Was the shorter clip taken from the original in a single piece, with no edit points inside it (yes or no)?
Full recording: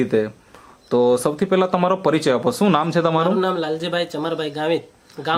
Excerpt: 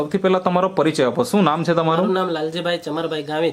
yes